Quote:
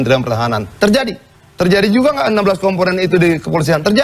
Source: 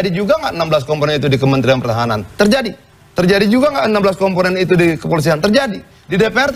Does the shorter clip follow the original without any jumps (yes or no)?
yes